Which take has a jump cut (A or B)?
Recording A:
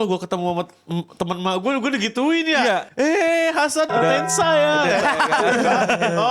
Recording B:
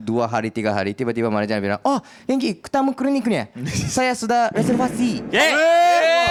A